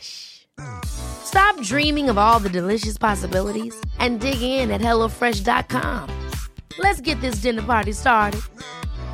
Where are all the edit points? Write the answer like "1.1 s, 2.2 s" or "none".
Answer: none